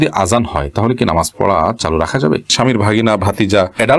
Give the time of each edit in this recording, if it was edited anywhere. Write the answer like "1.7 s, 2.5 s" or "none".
2.5 s